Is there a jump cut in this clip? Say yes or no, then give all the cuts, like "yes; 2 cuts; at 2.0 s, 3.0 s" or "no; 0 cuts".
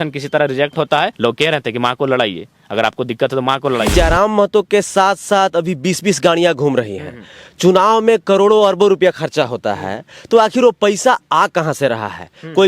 yes; 2 cuts; at 1.1 s, 3.9 s